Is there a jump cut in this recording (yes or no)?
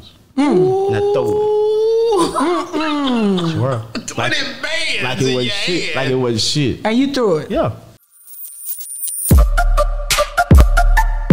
yes